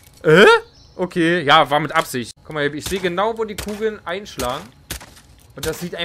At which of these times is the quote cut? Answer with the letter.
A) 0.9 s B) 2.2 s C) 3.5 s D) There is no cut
B